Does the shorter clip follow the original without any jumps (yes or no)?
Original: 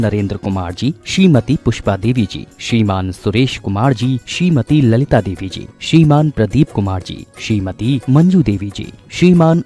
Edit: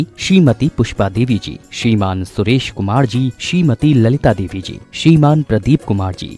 yes